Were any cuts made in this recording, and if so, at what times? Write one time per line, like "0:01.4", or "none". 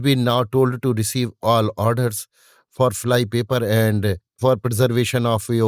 0:04.5